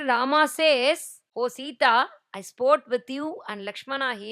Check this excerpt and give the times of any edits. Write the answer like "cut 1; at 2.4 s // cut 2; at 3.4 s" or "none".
cut 1; at 1.2 s

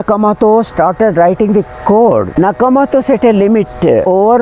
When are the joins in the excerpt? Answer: cut 1; at 2.3 s

